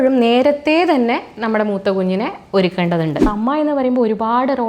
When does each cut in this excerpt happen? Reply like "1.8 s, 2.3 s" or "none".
3.2 s